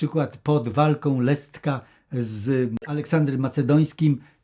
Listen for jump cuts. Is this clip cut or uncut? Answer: uncut